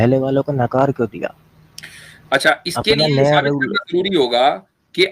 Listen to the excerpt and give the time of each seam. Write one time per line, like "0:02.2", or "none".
none

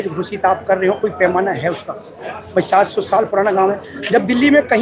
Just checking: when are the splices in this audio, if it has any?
none

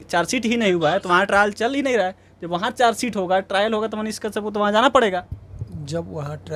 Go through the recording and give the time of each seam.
none

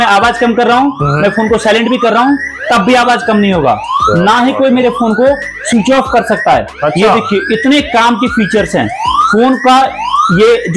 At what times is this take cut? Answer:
none

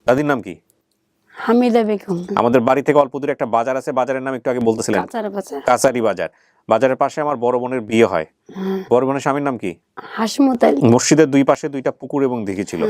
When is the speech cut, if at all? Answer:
0:02.1
0:10.8

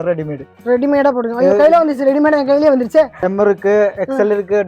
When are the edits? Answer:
0:03.3

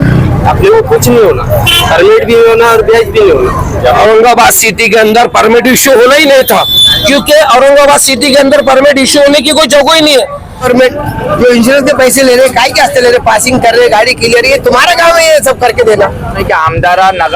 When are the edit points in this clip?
0:04.0
0:10.7
0:16.4

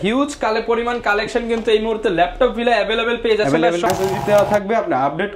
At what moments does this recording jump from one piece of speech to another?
0:03.9

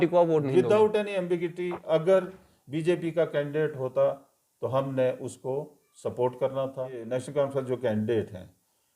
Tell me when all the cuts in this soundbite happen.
0:07.1

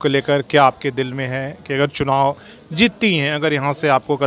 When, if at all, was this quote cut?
none

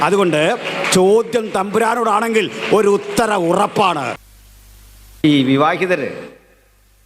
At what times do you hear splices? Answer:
0:04.2

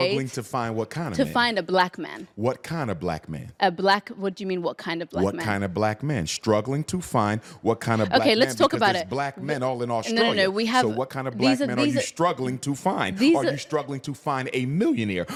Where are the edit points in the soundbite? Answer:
none

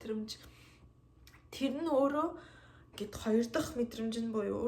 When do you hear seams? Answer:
none

